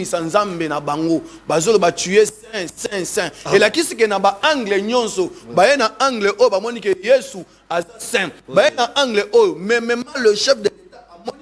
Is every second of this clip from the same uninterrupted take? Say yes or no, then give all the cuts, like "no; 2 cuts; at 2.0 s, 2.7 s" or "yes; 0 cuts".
yes; 0 cuts